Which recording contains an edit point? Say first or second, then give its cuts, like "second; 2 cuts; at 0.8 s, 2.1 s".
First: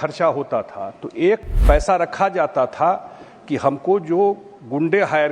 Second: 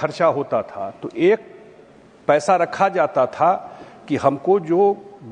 first; 1 cut; at 1.5 s